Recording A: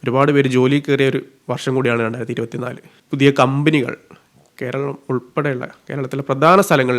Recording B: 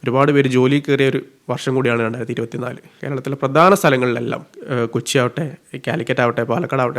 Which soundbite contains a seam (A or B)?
B